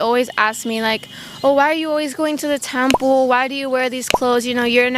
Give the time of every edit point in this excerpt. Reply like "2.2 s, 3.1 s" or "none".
none